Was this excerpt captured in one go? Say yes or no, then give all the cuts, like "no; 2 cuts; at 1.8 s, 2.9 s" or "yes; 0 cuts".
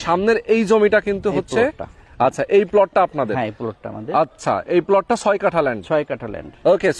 yes; 0 cuts